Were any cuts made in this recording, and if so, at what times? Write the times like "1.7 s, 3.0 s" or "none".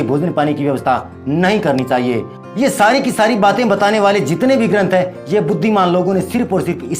2.4 s